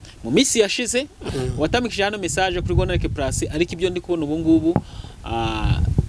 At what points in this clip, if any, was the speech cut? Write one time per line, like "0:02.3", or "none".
0:01.2